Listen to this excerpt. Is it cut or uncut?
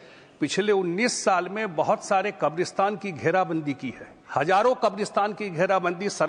uncut